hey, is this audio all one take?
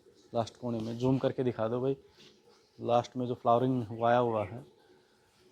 yes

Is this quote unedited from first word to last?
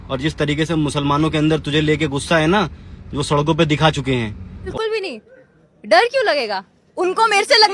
no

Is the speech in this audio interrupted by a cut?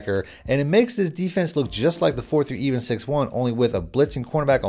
no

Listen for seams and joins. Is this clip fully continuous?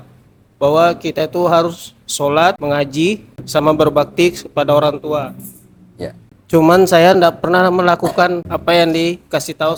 yes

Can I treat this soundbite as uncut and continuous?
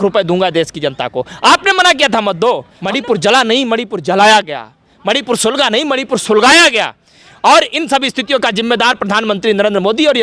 no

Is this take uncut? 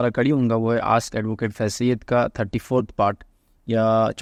yes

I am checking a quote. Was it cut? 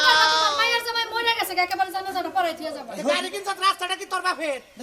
yes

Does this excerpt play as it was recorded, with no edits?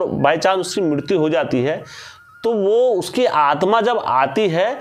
yes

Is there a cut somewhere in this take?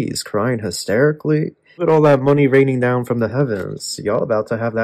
yes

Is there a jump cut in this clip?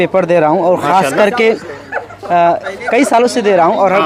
no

